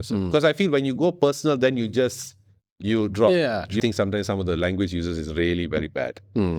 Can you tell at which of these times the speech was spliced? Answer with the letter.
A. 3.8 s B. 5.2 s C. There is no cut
A